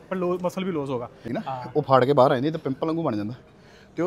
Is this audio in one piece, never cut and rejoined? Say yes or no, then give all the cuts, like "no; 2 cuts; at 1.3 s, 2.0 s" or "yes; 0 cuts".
no; 1 cut; at 1.2 s